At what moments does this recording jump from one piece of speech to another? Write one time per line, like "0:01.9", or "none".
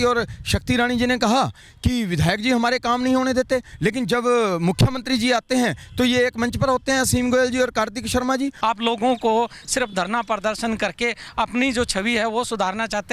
0:08.5